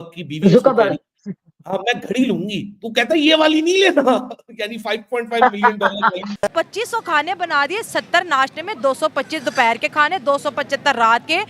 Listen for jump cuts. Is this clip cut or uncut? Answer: cut